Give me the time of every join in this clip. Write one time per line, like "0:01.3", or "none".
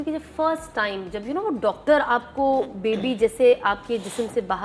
none